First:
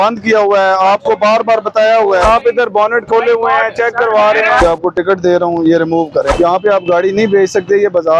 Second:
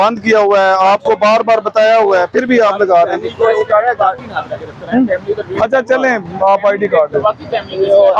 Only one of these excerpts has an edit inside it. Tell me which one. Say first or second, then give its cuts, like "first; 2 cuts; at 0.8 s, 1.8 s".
first; 3 cuts; at 2.3 s, 4.6 s, 6.3 s